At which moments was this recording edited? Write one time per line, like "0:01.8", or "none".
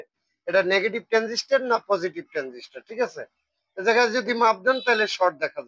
none